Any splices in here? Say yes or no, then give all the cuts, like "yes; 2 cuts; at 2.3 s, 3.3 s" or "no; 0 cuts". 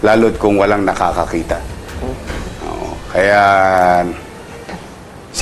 no; 0 cuts